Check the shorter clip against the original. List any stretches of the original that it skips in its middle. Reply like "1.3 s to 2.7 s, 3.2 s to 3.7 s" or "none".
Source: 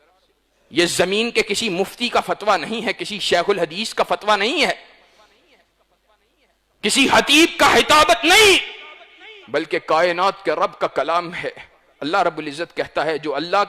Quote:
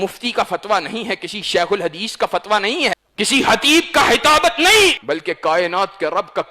4.8 s to 6.7 s, 8.6 s to 9.4 s